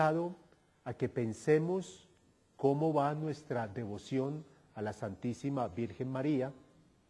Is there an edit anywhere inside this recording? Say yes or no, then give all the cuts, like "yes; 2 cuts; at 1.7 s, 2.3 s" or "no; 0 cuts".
yes; 1 cut; at 5.4 s